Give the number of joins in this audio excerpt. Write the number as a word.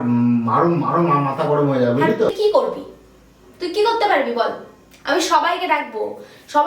one